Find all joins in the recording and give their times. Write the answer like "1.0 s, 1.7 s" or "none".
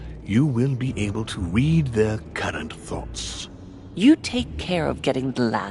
3.2 s